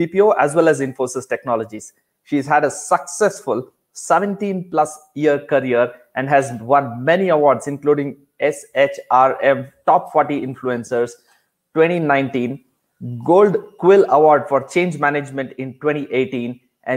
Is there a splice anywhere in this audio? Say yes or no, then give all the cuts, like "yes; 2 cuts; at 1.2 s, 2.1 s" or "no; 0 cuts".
no; 0 cuts